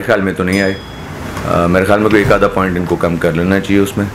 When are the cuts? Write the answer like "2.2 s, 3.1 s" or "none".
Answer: none